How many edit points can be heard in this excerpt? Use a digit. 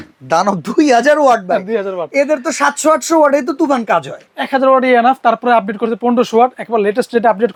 0